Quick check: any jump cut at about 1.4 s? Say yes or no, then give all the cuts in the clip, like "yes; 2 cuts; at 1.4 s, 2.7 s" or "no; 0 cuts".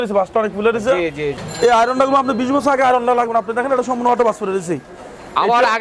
yes; 1 cut; at 1.4 s